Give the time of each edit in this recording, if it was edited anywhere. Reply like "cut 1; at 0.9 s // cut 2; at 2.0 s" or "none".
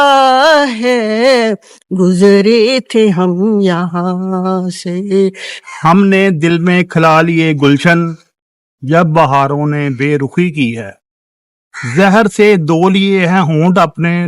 cut 1; at 5.5 s